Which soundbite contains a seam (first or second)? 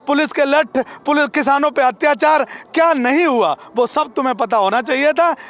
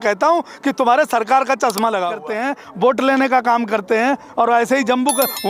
second